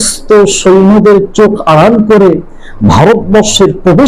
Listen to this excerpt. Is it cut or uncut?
uncut